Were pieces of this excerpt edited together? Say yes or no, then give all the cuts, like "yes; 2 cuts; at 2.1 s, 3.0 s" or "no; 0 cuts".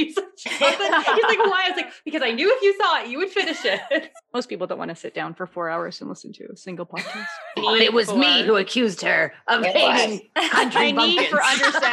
yes; 2 cuts; at 4.2 s, 7.6 s